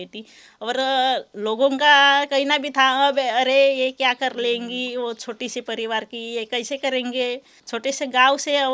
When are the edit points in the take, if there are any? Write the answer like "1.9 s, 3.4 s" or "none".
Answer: 7.6 s